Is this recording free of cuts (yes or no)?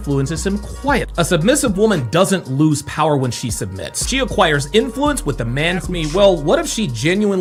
yes